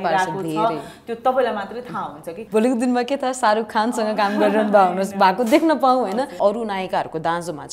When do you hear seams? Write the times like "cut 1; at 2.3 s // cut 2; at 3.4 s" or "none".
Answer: cut 1; at 2.4 s // cut 2; at 6.3 s